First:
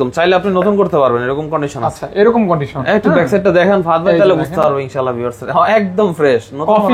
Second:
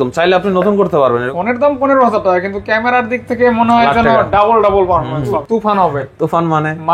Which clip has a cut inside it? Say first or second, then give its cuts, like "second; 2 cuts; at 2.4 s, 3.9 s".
second; 2 cuts; at 1.3 s, 5.4 s